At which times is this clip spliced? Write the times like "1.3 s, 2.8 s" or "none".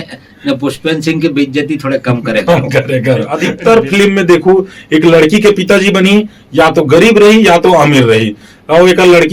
3.6 s